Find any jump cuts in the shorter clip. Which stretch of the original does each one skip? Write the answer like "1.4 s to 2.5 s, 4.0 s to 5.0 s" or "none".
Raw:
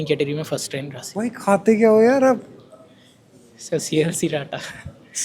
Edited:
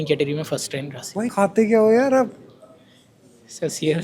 1.3 s to 1.4 s